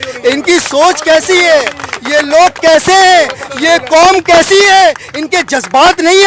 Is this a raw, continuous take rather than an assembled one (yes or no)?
yes